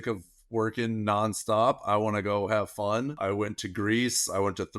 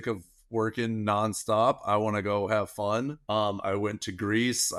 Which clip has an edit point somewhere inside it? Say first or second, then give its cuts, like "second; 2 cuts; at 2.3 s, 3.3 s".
first; 1 cut; at 3.2 s